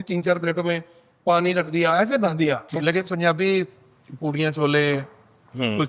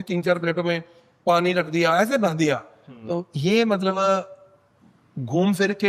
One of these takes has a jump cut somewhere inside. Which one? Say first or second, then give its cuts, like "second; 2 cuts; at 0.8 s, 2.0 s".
first; 1 cut; at 2.7 s